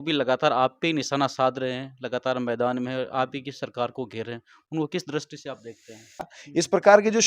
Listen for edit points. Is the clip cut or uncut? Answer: cut